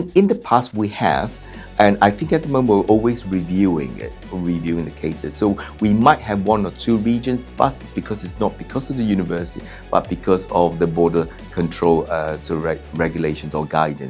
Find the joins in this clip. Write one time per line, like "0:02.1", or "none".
none